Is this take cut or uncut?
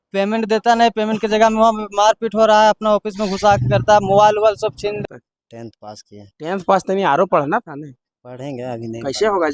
cut